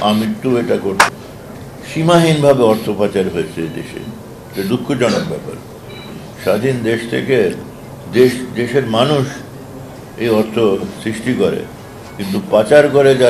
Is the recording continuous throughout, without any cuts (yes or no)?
no